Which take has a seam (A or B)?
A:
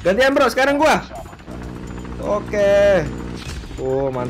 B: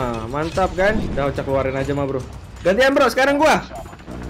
B